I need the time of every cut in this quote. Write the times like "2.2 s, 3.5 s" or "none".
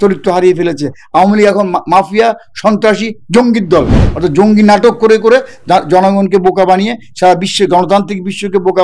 3.9 s